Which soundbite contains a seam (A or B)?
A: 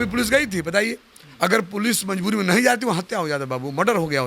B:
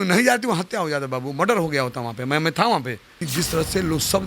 B